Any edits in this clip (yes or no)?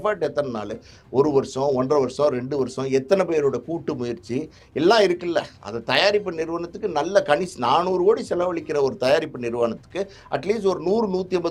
no